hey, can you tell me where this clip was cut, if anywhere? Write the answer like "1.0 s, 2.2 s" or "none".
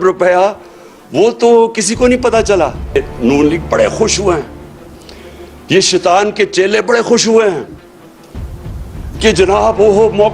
3.0 s